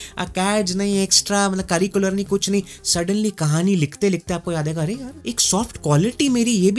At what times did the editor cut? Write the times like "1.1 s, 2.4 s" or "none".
5.3 s